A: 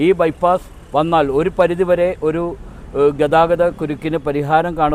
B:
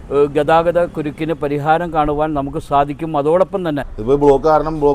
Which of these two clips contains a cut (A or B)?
B